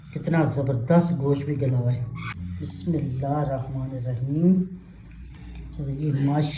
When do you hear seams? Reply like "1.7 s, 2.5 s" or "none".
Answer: 2.3 s